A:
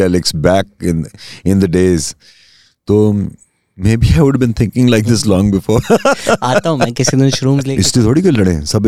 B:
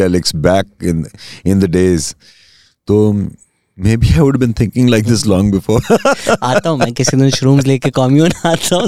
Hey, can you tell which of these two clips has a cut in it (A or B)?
A